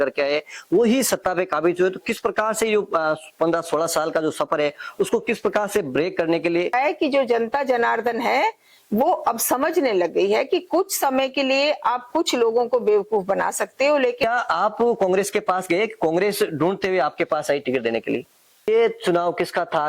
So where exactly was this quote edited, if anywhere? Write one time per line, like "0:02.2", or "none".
0:06.7
0:14.2
0:18.7